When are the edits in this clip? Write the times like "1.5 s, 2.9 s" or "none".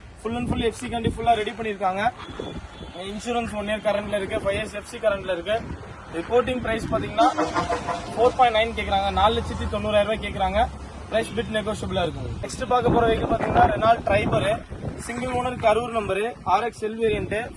none